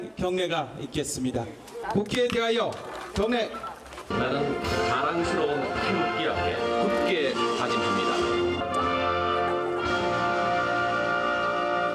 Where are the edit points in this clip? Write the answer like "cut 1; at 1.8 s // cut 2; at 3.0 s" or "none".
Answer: none